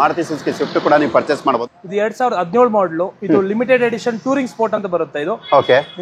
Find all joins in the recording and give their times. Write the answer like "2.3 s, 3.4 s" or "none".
1.4 s